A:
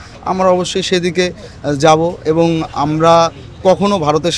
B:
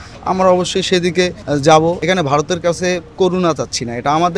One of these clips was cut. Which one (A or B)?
B